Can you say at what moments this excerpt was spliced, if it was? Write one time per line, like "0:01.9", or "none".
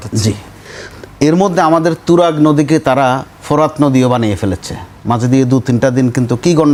none